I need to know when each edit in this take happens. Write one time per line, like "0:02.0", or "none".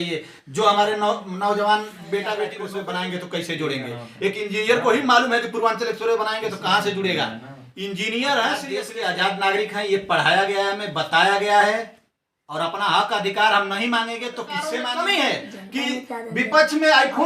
0:02.7
0:08.9
0:14.8